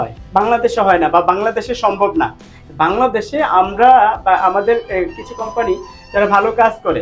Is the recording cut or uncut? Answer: uncut